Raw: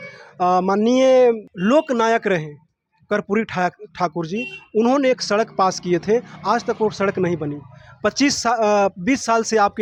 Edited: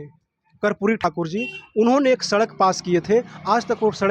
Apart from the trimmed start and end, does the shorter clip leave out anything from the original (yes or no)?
yes